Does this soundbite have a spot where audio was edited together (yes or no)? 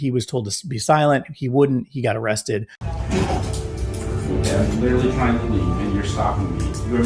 yes